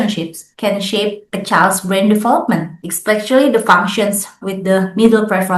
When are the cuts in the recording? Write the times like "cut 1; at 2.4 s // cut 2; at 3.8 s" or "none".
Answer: cut 1; at 4.4 s